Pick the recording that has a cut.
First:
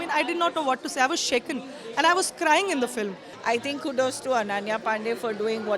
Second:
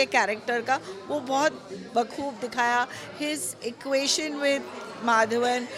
first; 1 cut; at 3.3 s

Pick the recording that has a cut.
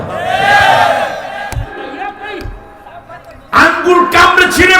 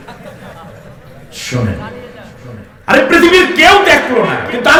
first; 1 cut; at 1.7 s

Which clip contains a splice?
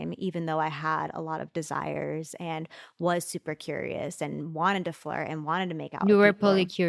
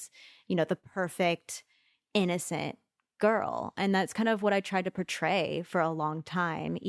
first; 1 cut; at 6.0 s

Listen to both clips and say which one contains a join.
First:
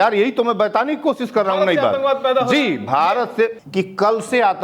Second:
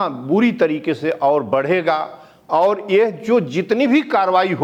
first; 1 cut; at 3.6 s

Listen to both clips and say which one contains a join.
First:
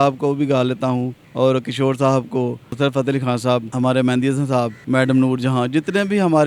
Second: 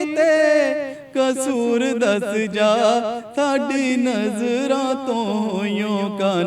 first; 4 cuts; at 1.2 s, 2.7 s, 3.7 s, 4.8 s

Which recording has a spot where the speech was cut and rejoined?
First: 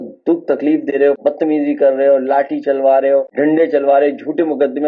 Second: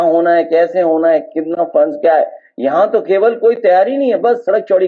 first; 2 cuts; at 1.2 s, 3.3 s

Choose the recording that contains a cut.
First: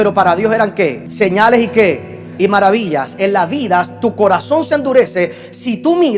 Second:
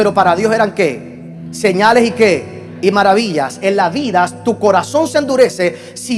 first; 1 cut; at 1.0 s

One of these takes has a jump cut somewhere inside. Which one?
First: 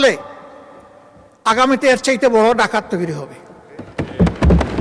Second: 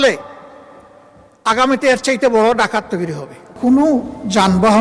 second; 1 cut; at 3.6 s

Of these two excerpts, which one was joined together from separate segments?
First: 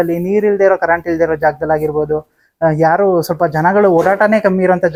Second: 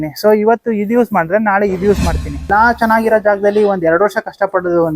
second; 1 cut; at 2.5 s

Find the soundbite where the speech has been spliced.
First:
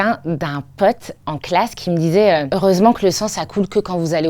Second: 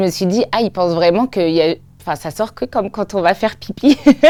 first; 1 cut; at 2.5 s

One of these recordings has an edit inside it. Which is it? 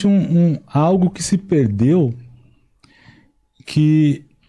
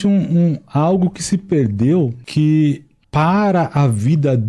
second; 2 cuts; at 2.2 s, 2.9 s

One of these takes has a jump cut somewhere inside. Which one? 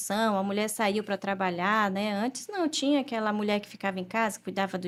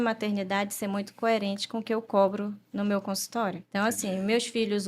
second; 1 cut; at 3.6 s

